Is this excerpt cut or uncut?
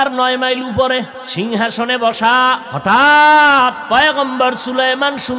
cut